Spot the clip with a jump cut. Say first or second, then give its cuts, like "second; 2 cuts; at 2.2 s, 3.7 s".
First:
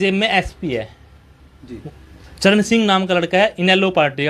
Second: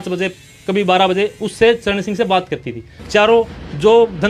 second; 1 cut; at 2.9 s